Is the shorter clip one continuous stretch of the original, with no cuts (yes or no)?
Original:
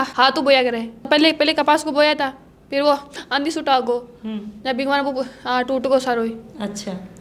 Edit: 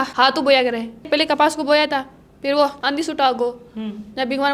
no